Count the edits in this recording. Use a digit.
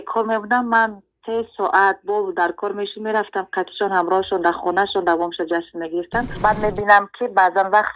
1